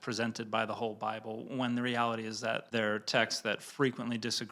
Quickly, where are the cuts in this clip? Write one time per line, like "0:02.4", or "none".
none